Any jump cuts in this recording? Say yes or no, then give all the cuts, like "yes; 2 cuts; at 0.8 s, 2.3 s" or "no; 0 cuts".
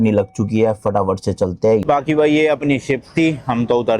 yes; 1 cut; at 1.8 s